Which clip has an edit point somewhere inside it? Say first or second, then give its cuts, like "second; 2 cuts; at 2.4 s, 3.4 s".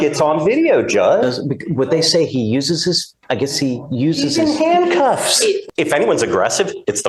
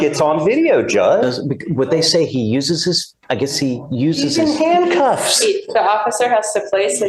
first; 1 cut; at 5.6 s